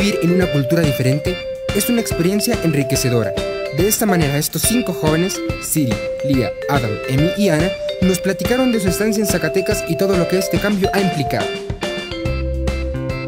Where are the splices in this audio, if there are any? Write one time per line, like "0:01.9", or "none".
none